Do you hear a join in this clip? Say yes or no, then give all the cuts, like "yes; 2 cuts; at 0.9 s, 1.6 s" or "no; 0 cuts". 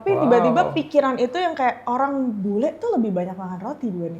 no; 0 cuts